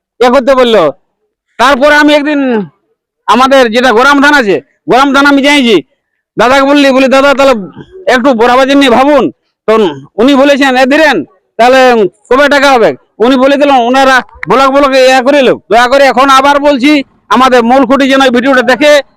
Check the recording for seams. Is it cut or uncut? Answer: cut